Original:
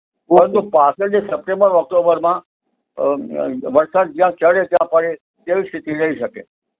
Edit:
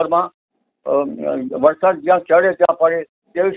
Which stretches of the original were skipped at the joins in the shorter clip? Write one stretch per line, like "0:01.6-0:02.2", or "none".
none